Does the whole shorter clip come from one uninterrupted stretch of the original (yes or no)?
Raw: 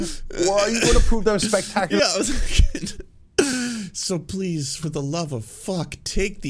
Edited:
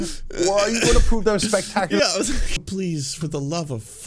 no